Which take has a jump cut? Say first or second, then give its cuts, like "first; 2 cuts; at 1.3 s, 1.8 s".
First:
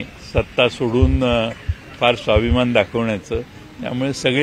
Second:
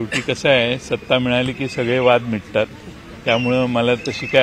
second; 1 cut; at 1.5 s